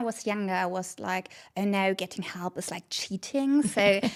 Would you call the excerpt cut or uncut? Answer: uncut